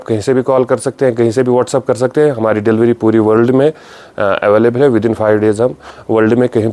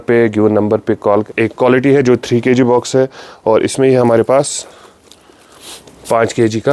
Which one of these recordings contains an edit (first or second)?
second